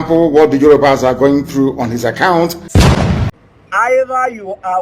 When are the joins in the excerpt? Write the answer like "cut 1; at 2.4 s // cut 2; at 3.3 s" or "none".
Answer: cut 1; at 2.6 s